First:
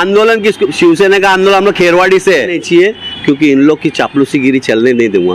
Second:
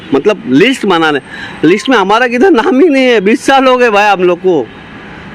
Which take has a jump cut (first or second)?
first